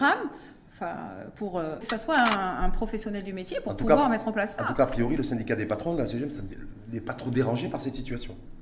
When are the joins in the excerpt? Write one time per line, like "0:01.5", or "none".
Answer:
0:01.8

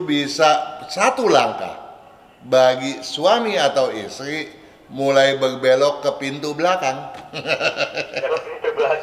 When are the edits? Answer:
none

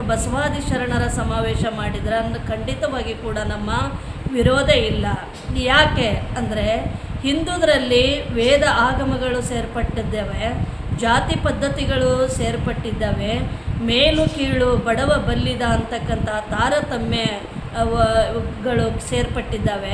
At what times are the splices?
none

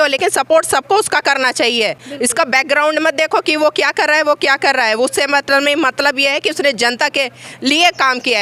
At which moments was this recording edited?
none

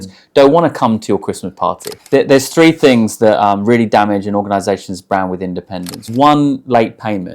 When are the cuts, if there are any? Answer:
0:01.9
0:06.0

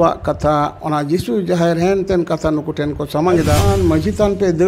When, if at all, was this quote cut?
0:03.7

